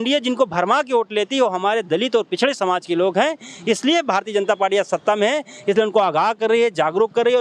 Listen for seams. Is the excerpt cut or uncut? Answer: uncut